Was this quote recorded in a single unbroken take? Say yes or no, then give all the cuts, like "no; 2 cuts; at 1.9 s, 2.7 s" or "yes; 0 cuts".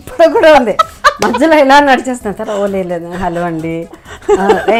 yes; 0 cuts